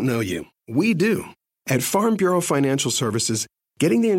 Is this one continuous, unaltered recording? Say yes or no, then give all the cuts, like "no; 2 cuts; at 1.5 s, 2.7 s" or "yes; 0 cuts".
no; 1 cut; at 1.4 s